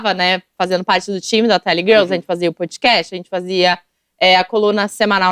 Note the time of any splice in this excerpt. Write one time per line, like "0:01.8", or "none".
none